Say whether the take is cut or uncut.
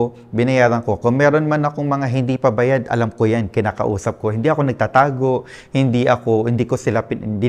uncut